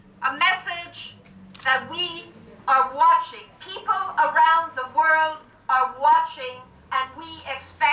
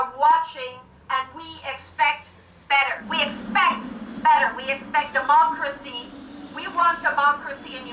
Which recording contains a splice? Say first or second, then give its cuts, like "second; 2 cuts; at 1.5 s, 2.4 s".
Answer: second; 1 cut; at 3.0 s